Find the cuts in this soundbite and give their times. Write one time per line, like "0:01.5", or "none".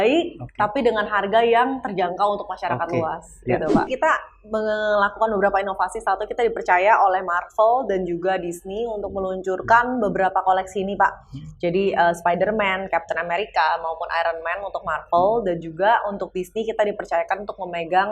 0:03.9